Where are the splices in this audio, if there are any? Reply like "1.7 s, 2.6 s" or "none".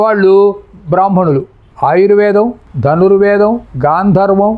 1.7 s